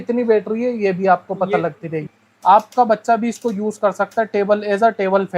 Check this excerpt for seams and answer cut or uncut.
cut